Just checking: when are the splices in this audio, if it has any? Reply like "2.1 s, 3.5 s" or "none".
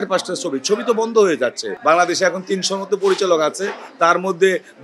1.7 s